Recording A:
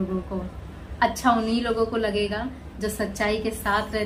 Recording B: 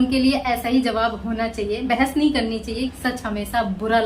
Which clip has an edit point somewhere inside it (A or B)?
B